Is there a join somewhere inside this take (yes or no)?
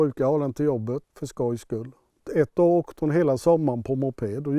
yes